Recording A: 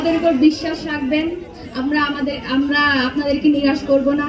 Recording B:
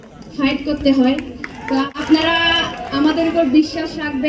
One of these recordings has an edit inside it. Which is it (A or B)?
B